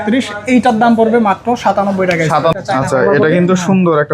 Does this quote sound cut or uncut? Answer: cut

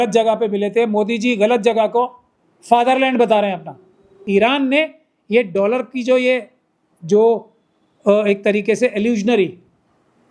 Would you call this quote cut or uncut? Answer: cut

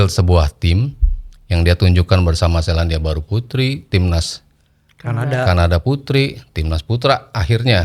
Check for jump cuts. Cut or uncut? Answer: uncut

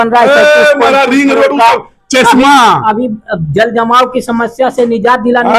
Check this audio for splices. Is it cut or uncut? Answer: uncut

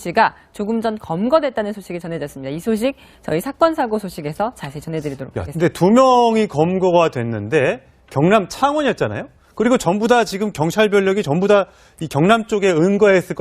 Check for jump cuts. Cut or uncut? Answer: uncut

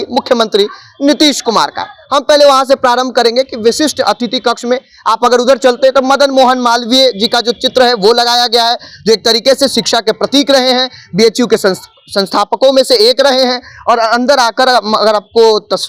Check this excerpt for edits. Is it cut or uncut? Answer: uncut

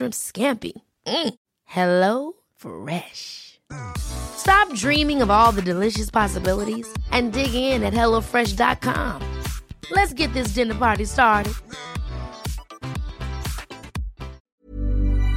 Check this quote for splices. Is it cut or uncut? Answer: cut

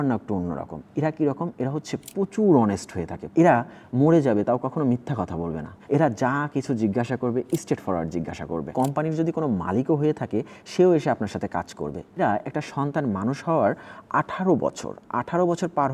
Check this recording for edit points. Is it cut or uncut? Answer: cut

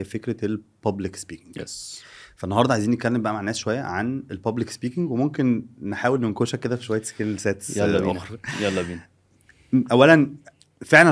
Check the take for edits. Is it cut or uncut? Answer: uncut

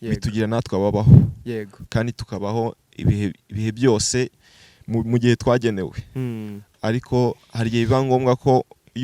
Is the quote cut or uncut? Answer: uncut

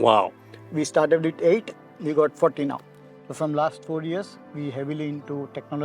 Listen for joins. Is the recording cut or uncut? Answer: cut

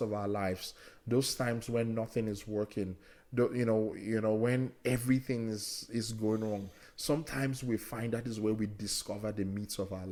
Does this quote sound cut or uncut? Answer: uncut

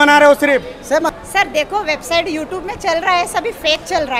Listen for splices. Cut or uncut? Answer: cut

